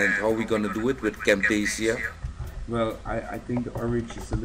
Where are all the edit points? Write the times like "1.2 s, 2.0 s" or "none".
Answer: none